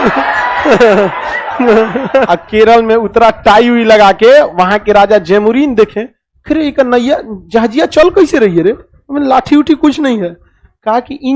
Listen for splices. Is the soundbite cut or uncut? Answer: cut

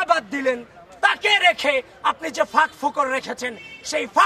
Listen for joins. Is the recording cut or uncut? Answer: uncut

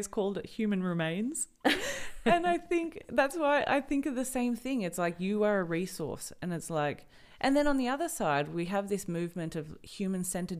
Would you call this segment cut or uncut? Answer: uncut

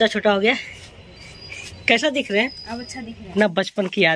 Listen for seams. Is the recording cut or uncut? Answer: cut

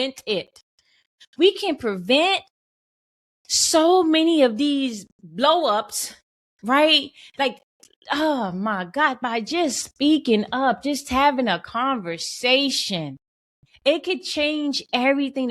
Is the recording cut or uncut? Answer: cut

